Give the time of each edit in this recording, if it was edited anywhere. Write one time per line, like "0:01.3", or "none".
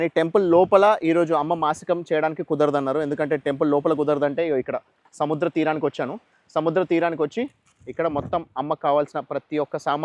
none